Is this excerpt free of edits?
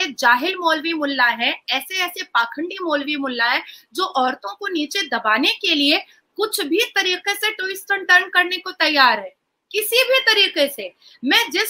yes; 0 cuts

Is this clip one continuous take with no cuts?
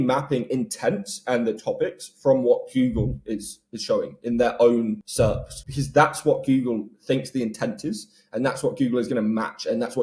no; 1 cut; at 5.4 s

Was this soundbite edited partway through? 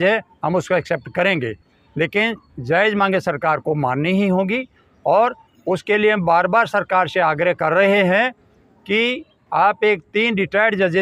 no; 0 cuts

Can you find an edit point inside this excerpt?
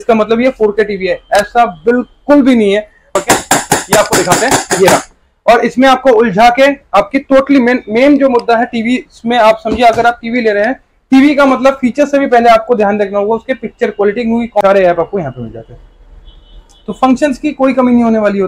yes; 2 cuts; at 3.1 s, 14.6 s

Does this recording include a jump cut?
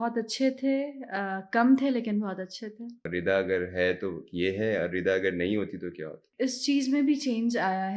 yes; 2 cuts; at 2.9 s, 6.2 s

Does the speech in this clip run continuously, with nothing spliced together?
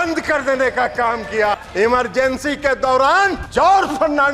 no; 2 cuts; at 1.5 s, 3.4 s

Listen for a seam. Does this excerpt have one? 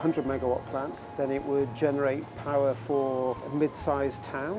yes; 3 cuts; at 1.0 s, 2.3 s, 3.4 s

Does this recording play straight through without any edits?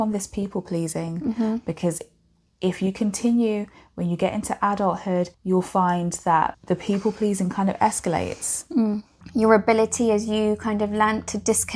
no; 3 cuts; at 5.4 s, 6.6 s, 9.1 s

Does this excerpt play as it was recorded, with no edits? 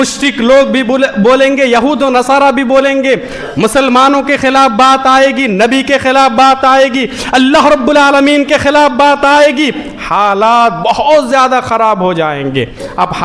yes; 0 cuts

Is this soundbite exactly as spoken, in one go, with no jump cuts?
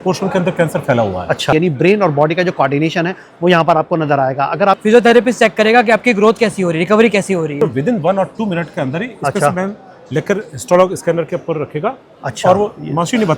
no; 3 cuts; at 1.5 s, 4.8 s, 7.6 s

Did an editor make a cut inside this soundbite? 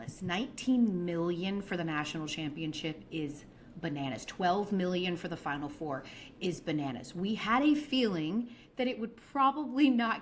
yes; 1 cut; at 4.7 s

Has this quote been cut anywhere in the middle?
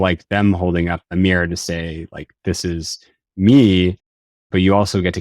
yes; 1 cut; at 1.0 s

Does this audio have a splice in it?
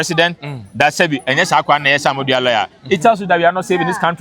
no; 0 cuts

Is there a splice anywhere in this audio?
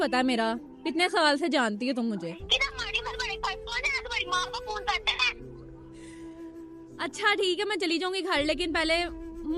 no; 0 cuts

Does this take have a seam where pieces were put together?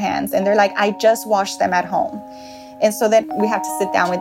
yes; 1 cut; at 3.2 s

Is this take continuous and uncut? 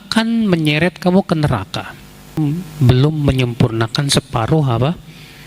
no; 1 cut; at 2.4 s

